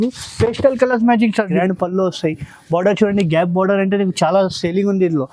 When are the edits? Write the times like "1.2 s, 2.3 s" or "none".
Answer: 1.6 s